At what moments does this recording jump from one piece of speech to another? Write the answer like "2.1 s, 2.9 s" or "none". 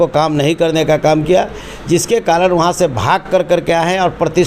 none